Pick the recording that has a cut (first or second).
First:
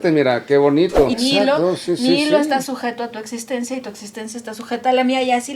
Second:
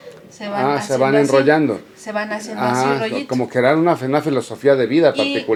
first